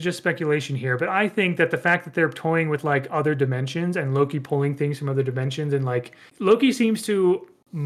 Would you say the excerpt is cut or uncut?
cut